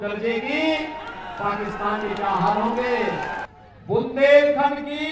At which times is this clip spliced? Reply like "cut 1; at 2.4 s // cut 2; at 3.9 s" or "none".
cut 1; at 3.5 s